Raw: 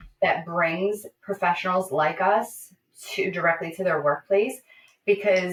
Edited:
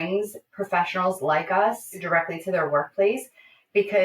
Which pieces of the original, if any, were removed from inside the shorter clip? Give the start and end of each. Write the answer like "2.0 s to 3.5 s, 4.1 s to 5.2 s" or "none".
2.7 s to 3.3 s